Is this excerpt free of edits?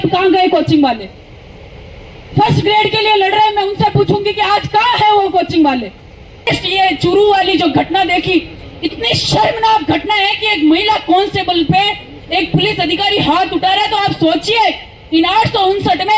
no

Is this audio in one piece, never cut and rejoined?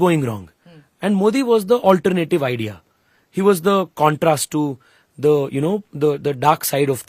yes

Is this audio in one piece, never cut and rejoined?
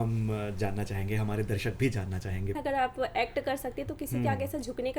no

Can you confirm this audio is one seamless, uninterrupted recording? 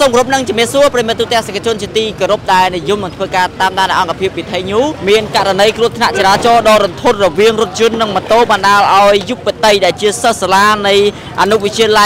no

